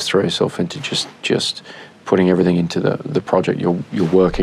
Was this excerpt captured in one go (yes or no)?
yes